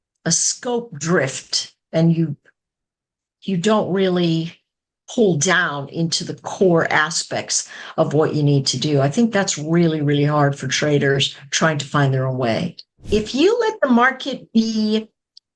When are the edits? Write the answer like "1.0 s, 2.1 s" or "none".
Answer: 12.9 s